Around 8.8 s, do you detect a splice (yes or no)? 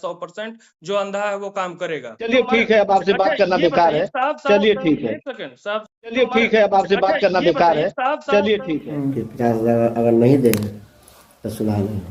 yes